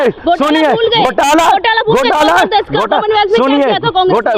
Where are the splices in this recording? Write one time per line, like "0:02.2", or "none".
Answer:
none

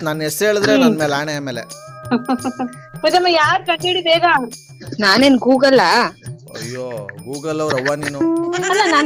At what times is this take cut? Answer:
none

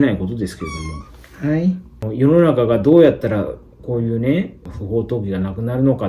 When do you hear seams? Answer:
0:02.0
0:04.7

